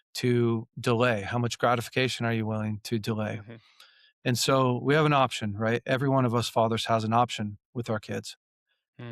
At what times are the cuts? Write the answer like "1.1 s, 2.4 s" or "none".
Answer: none